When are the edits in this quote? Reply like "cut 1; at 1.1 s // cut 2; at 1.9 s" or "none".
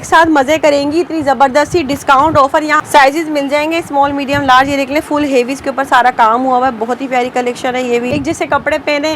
cut 1; at 2.8 s // cut 2; at 8.1 s